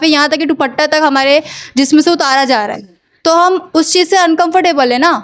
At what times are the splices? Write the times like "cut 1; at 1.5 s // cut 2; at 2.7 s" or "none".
none